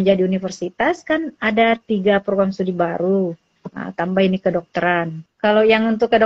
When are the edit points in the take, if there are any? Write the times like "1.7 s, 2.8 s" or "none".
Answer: 5.2 s